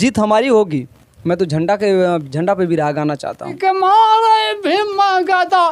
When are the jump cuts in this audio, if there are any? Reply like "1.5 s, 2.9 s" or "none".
3.6 s

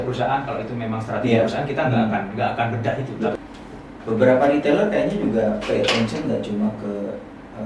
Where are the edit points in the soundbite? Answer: 3.3 s

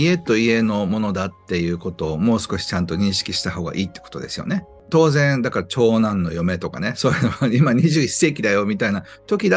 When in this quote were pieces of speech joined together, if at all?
4.9 s

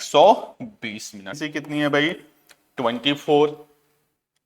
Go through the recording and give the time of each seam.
1.4 s

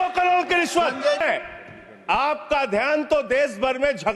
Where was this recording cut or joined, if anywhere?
1.2 s

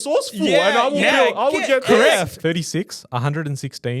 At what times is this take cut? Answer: 2.3 s

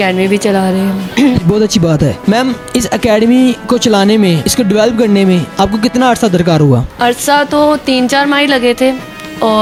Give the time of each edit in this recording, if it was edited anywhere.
none

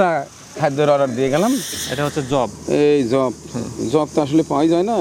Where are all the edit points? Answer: 1.8 s

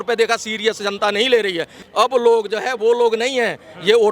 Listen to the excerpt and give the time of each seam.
1.8 s

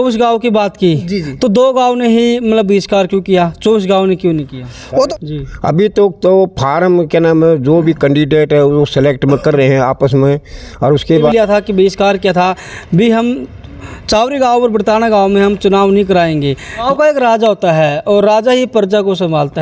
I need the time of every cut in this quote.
5.1 s, 11.3 s, 16.8 s

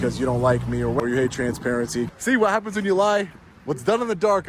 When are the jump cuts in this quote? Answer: 1.0 s, 2.1 s

